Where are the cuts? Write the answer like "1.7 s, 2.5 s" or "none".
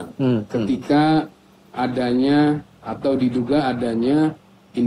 none

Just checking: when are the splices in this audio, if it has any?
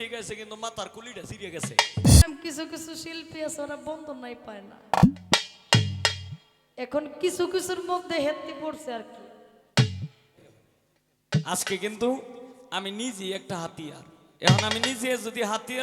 2.2 s, 10.3 s

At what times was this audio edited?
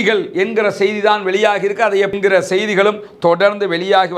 2.2 s

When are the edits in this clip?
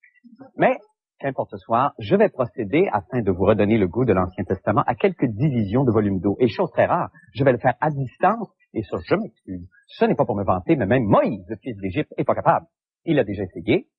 none

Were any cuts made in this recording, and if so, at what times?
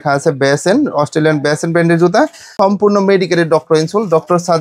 2.5 s

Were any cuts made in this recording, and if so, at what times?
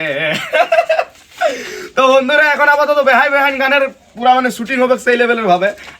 none

